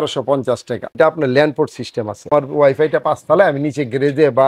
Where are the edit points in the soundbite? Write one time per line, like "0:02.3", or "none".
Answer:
0:00.9
0:02.3